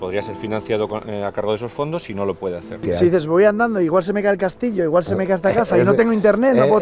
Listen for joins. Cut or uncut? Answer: cut